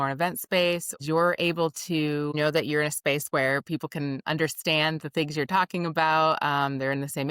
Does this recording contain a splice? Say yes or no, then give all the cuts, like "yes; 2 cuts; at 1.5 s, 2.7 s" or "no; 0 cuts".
yes; 2 cuts; at 1.0 s, 2.3 s